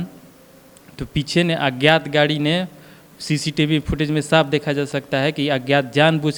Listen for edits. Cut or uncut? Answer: uncut